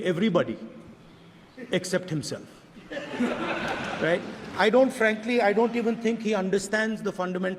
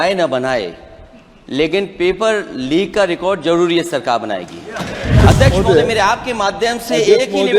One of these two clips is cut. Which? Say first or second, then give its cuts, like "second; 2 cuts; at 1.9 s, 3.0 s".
second; 1 cut; at 5.2 s